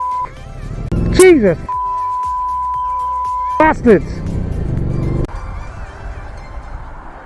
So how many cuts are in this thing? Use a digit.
2